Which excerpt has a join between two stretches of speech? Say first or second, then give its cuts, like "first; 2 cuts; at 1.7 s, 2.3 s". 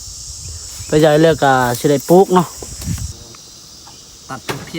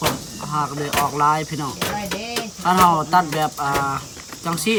first; 1 cut; at 3.2 s